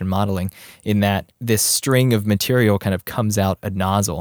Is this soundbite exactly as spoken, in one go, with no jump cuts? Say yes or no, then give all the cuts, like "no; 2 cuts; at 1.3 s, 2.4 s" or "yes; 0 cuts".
no; 1 cut; at 1.3 s